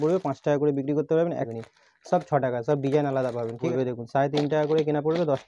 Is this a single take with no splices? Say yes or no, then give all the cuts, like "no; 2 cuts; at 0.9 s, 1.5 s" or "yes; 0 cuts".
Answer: no; 2 cuts; at 1.5 s, 3.7 s